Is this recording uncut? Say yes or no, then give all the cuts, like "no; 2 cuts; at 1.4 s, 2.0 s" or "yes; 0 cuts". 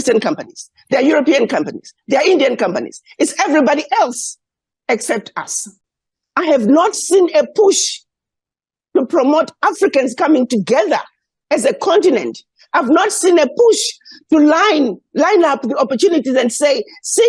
yes; 0 cuts